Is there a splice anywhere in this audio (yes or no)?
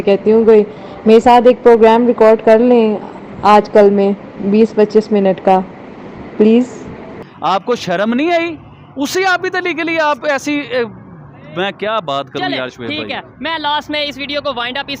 no